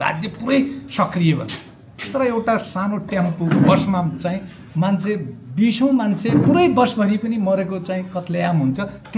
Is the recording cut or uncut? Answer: uncut